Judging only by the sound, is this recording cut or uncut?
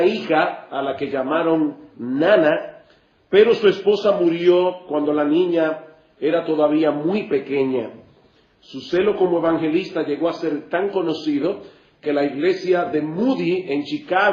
cut